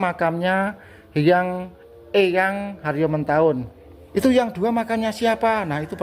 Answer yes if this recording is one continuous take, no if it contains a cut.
no